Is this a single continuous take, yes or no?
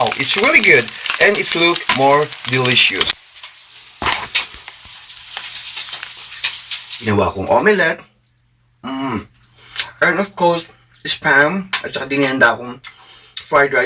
no